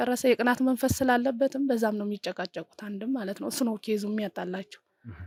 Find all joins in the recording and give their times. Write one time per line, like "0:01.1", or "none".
none

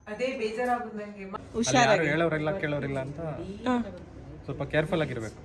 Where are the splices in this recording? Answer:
0:01.4

